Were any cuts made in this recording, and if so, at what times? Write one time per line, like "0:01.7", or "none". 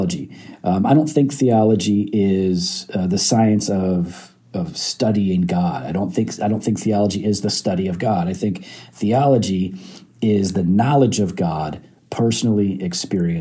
none